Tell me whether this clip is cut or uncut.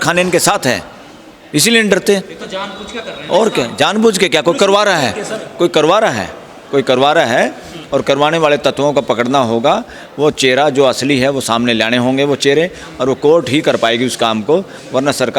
uncut